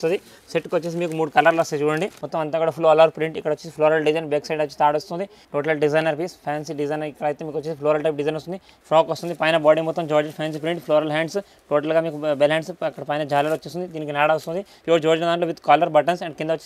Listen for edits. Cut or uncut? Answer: cut